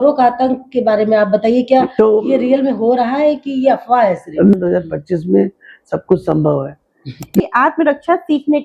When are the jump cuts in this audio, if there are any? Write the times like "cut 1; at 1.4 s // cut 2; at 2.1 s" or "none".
cut 1; at 4.5 s // cut 2; at 7.4 s